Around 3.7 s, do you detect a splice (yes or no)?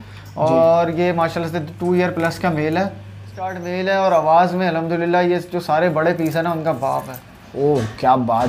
yes